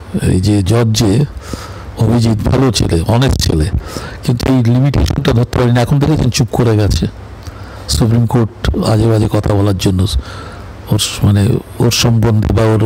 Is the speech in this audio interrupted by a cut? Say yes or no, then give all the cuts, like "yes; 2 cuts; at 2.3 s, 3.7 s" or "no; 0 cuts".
no; 0 cuts